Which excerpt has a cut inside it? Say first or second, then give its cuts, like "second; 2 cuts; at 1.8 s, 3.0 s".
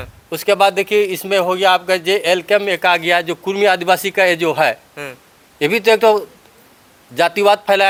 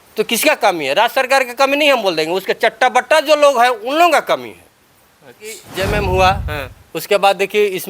second; 1 cut; at 5.7 s